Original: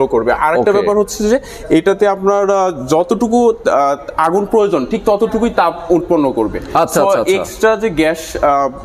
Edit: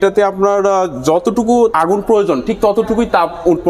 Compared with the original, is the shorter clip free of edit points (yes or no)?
no